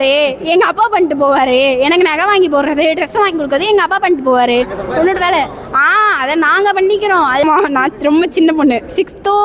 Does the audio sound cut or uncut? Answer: cut